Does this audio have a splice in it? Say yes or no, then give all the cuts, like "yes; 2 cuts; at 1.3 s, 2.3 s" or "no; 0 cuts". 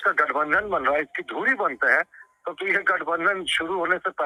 no; 0 cuts